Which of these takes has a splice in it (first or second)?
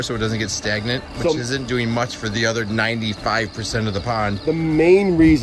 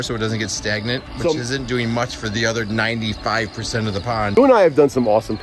second